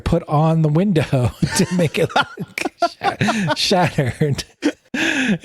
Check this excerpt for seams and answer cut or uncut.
uncut